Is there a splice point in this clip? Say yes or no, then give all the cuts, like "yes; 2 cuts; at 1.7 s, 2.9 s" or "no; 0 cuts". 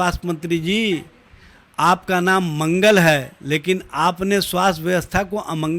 no; 0 cuts